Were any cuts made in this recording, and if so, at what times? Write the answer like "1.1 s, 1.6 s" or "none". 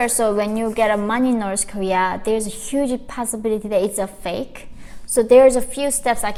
none